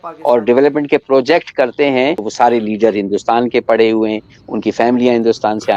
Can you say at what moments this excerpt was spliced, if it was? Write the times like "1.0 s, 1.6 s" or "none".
2.3 s